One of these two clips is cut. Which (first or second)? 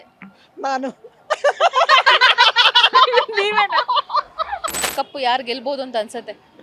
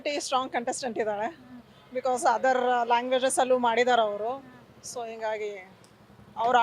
first